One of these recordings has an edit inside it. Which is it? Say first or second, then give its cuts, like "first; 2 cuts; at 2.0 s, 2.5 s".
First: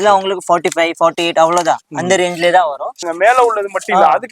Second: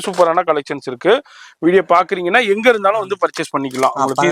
first; 1 cut; at 3.1 s